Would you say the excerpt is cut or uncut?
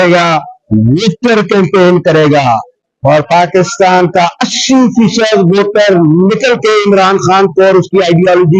uncut